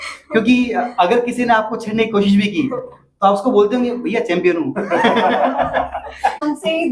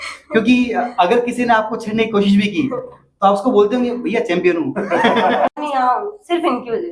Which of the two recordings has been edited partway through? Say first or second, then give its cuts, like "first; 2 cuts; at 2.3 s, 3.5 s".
second; 1 cut; at 5.5 s